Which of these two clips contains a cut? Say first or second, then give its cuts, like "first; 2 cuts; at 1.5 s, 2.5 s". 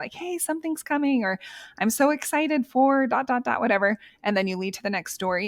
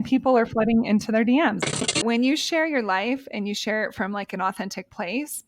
second; 1 cut; at 2.0 s